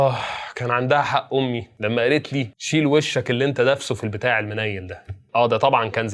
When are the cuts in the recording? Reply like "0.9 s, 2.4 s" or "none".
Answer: 2.6 s

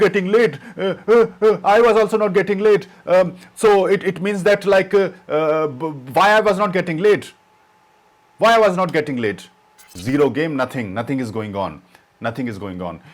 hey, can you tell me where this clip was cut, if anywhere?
10.0 s

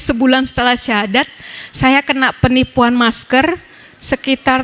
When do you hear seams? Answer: none

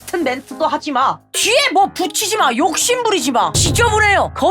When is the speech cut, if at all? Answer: none

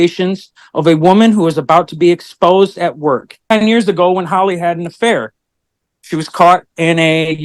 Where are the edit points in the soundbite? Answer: 3.4 s

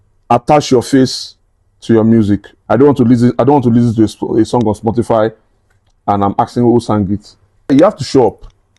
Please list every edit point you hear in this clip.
2.5 s, 7.7 s

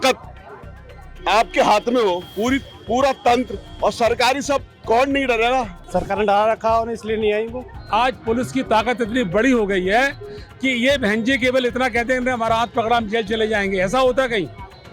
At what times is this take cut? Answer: 5.7 s, 7.8 s

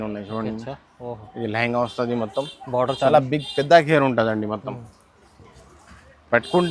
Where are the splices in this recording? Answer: none

